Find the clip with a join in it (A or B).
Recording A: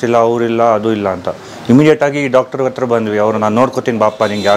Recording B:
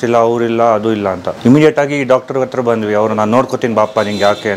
B